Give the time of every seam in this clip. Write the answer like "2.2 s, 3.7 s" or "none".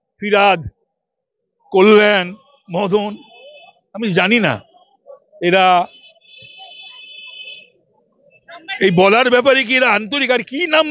none